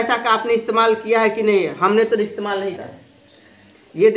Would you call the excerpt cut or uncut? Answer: cut